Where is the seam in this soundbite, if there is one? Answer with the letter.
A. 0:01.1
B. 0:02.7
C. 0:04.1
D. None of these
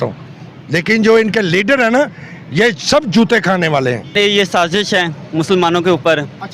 C